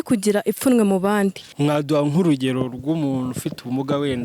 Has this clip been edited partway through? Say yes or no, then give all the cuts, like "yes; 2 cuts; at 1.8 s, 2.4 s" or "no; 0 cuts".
yes; 1 cut; at 1.5 s